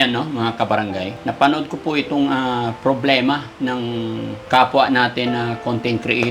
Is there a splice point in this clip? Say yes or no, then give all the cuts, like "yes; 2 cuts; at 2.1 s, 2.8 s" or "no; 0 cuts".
yes; 2 cuts; at 1.1 s, 4.3 s